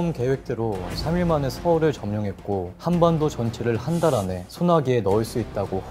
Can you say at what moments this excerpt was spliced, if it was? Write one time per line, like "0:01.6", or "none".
0:02.7
0:04.4